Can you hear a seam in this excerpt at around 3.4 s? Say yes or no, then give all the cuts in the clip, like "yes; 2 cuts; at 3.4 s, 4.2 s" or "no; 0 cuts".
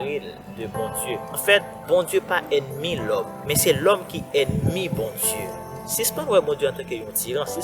yes; 3 cuts; at 1.4 s, 3.4 s, 5.8 s